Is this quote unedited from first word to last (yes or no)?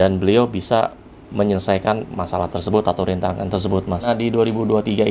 no